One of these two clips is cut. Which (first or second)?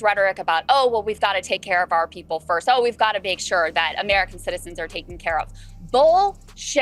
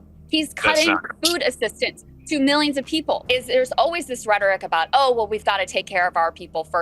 second